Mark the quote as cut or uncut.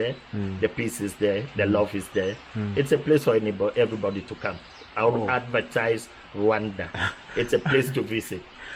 uncut